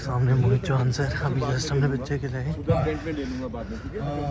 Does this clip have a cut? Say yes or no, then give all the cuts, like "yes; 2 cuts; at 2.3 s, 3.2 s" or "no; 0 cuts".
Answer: no; 0 cuts